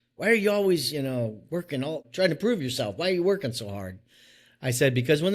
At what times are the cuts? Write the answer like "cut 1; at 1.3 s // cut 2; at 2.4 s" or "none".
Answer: cut 1; at 2.0 s